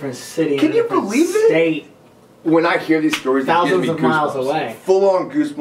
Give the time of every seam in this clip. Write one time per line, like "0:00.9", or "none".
none